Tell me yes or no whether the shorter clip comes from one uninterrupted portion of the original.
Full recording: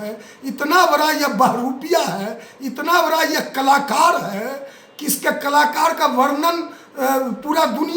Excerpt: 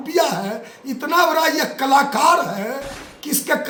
yes